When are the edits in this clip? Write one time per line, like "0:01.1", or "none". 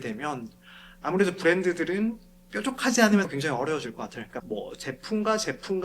0:04.4